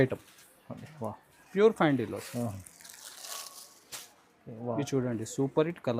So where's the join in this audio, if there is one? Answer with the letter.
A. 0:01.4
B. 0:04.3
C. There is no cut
A